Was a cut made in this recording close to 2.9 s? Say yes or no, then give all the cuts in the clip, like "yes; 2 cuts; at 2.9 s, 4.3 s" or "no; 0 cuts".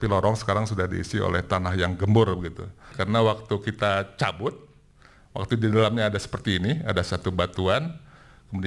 yes; 1 cut; at 2.9 s